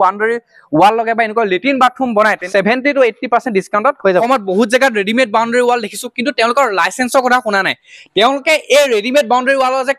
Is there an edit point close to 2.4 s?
yes; 2 cuts; at 2.4 s, 4.2 s

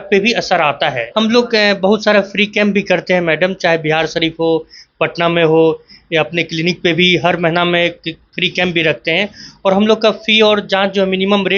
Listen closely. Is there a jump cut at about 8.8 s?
no; 1 cut; at 1.0 s

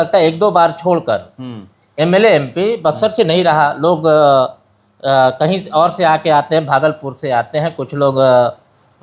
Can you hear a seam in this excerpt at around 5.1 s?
no; 0 cuts

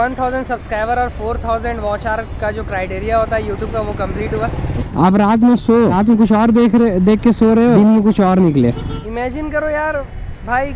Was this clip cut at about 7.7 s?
yes; 4 cuts; at 4.9 s, 6.0 s, 7.7 s, 9.0 s

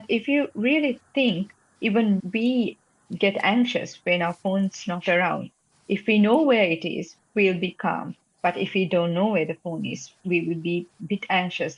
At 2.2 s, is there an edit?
yes; 1 cut; at 2.2 s

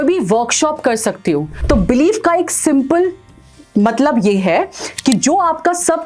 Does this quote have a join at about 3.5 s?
no; 1 cut; at 1.5 s

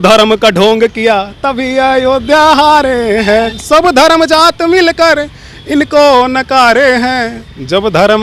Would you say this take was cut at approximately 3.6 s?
yes; 1 cut; at 3.6 s

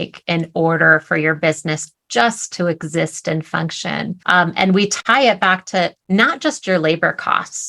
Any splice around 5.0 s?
yes; 2 cuts; at 4.2 s, 5.0 s

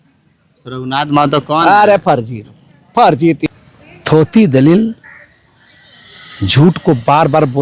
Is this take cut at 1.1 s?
no; 1 cut; at 3.5 s

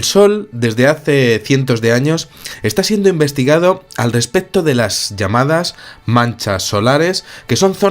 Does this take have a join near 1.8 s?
no; 1 cut; at 5.7 s

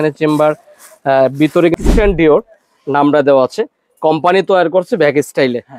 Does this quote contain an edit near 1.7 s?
yes; 1 cut; at 1.7 s

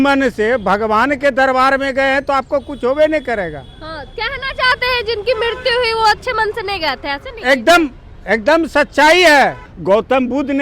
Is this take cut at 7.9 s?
no; 1 cut; at 9.7 s

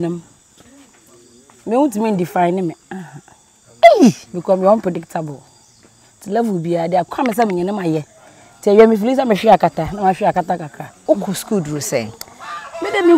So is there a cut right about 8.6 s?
no; 1 cut; at 11.0 s

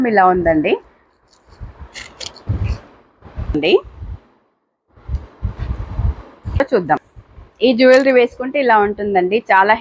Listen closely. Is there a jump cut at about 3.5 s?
yes; 2 cuts; at 3.5 s, 6.6 s

